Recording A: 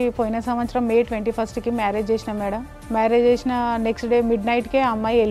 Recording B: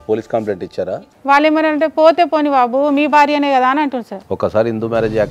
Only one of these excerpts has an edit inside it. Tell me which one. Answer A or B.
B